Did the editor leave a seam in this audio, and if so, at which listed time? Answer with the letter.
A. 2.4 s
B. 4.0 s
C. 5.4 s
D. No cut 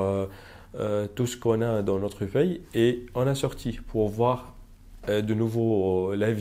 D